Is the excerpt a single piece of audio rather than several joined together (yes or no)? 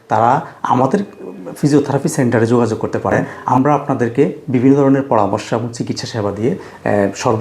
no